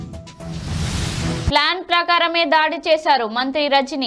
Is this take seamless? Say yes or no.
no